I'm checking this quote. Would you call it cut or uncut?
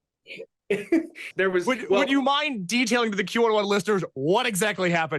cut